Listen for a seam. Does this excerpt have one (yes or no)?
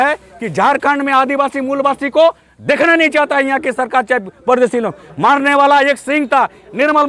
no